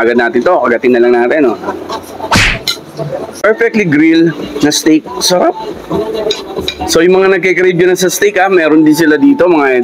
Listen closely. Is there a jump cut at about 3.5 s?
yes; 1 cut; at 3.5 s

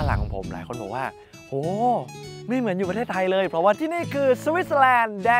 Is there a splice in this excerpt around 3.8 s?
yes; 1 cut; at 3.8 s

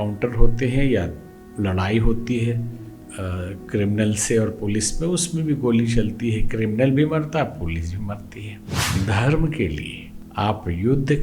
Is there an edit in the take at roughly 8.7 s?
yes; 1 cut; at 8.7 s

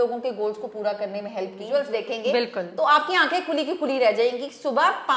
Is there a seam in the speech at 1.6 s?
yes; 1 cut; at 1.6 s

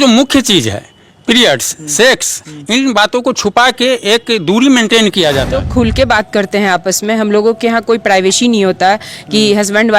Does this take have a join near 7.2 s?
no; 1 cut; at 5.6 s

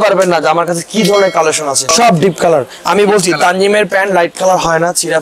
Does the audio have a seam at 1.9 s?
yes; 1 cut; at 1.9 s

